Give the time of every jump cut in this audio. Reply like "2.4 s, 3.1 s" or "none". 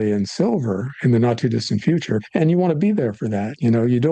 2.2 s